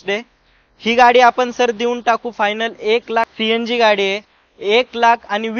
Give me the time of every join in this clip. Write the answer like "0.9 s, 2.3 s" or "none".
3.3 s